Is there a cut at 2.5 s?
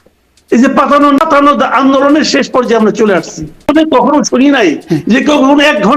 no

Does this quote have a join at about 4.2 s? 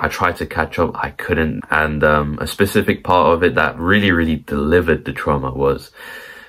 no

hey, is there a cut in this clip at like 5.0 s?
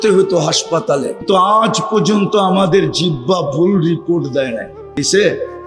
yes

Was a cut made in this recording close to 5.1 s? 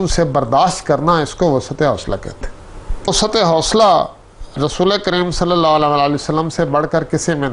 no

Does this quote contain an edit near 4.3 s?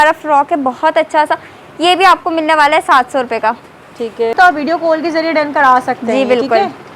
yes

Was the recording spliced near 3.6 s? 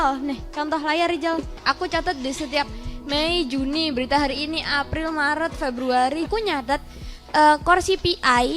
no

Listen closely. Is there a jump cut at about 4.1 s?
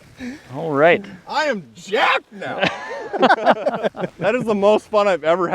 yes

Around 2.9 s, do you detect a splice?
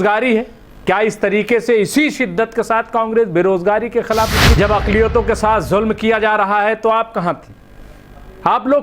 no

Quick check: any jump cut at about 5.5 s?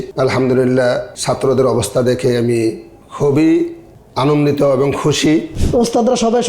yes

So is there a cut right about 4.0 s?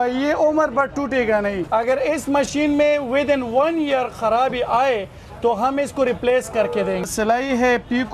no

